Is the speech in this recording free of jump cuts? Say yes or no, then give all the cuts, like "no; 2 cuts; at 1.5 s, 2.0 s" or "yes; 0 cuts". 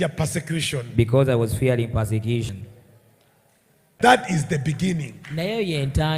no; 1 cut; at 4.0 s